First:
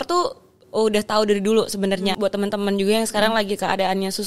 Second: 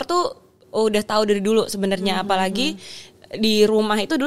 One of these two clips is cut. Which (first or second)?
first